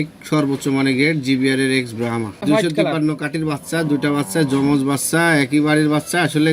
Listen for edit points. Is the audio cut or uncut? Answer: cut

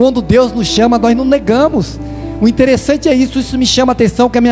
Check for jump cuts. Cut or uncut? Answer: uncut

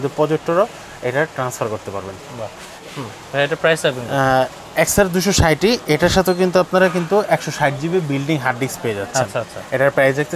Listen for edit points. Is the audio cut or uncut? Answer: uncut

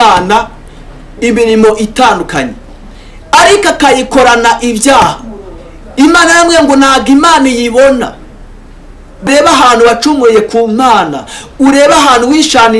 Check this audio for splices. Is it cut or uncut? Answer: cut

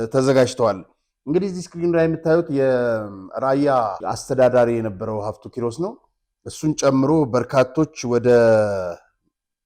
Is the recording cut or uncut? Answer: uncut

